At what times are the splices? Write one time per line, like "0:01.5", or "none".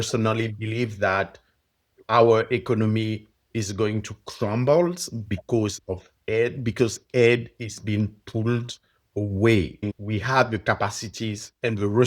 0:09.8